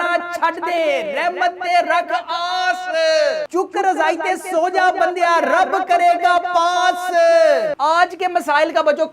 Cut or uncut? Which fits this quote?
cut